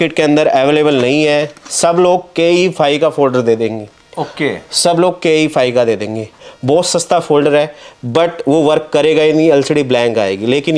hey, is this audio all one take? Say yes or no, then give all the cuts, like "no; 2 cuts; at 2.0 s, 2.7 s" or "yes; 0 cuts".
yes; 0 cuts